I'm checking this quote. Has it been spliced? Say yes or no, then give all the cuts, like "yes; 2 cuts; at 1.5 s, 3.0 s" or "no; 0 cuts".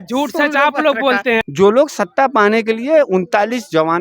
yes; 1 cut; at 1.4 s